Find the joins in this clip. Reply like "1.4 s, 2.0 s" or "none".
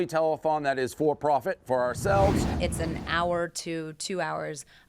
2.5 s